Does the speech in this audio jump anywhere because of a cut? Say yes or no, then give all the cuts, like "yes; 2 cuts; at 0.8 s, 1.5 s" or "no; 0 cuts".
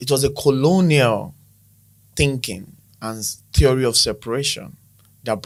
no; 0 cuts